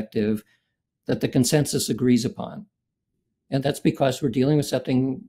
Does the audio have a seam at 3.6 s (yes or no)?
yes